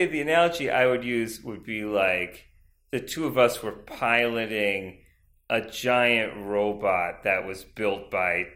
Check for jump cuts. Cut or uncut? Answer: uncut